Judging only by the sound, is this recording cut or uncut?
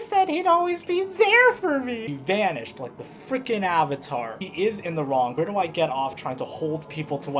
cut